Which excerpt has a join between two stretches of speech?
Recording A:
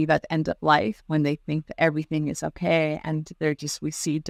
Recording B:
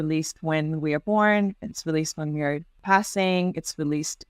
B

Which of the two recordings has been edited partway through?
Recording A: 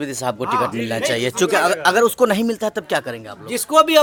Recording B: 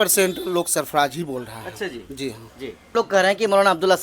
B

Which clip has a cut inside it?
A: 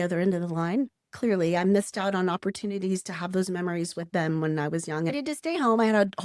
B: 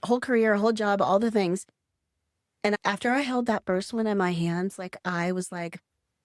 A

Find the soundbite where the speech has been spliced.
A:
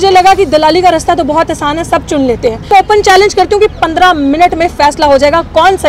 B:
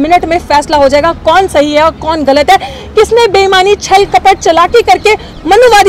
A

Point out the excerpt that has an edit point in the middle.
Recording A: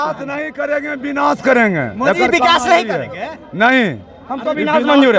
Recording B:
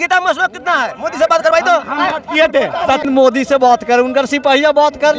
B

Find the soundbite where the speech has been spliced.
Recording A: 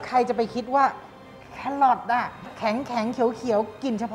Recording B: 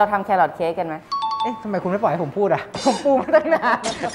A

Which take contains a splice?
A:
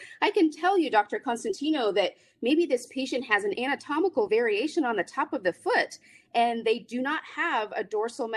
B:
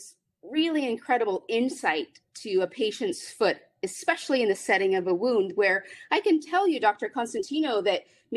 A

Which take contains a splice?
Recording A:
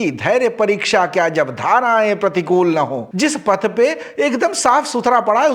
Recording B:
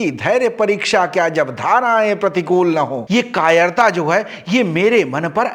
B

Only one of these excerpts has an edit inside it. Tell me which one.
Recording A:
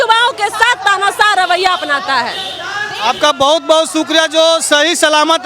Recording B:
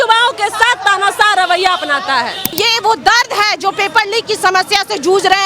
B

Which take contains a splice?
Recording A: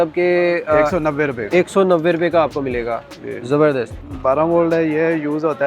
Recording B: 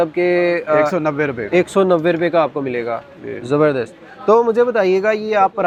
A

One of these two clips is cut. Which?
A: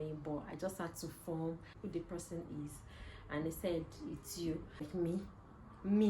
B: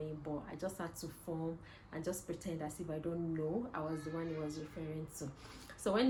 A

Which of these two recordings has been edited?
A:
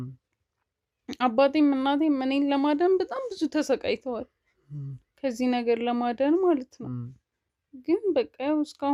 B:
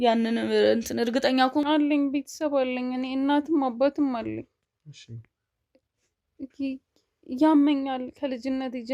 B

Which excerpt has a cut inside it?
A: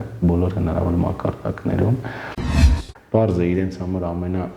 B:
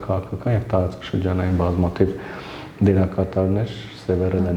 A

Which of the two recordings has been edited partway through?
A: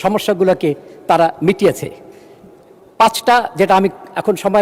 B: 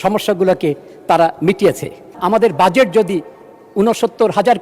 B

